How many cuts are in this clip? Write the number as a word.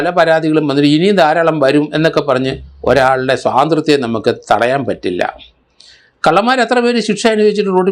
zero